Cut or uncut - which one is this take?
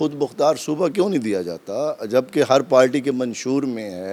uncut